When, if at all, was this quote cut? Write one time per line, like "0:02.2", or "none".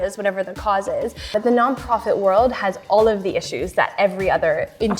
0:01.3